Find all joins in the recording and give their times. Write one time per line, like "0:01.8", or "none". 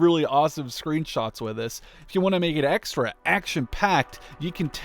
0:02.0